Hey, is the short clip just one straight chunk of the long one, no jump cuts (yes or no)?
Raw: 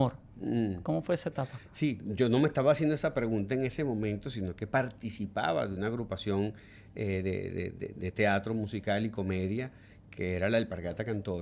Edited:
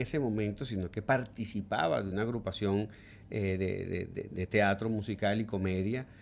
yes